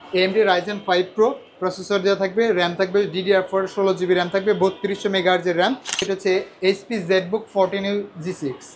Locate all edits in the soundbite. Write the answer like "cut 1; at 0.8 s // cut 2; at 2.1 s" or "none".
cut 1; at 6.0 s

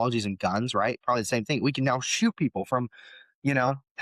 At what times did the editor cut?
none

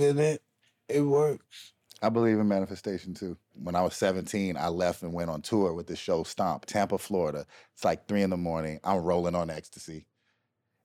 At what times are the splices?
cut 1; at 3.6 s // cut 2; at 6.7 s

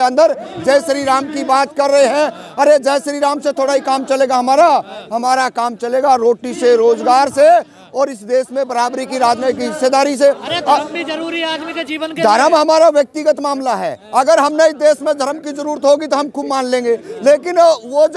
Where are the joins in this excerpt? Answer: none

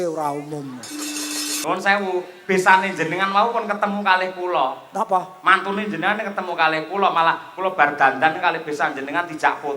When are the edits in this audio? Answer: cut 1; at 1.5 s

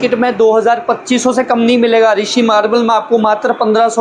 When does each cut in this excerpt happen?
none

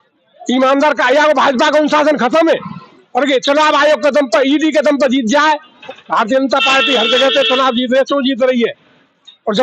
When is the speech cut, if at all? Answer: cut 1; at 5.7 s

